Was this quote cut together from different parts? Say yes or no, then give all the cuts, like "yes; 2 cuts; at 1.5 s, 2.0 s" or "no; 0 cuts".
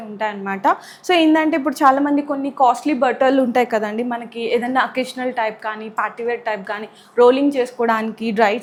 no; 0 cuts